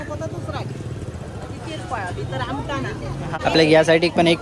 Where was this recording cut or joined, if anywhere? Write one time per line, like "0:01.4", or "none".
0:03.4